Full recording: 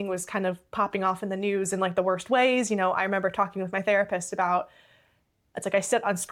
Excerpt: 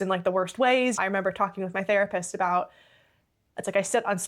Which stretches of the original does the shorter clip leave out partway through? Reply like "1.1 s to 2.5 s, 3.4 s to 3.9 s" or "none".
2.7 s to 2.9 s